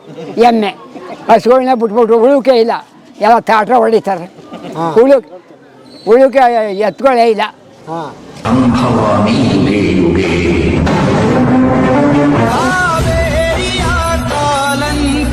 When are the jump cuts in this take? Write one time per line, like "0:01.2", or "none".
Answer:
none